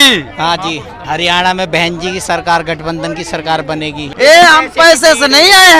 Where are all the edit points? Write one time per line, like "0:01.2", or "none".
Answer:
0:00.9
0:04.0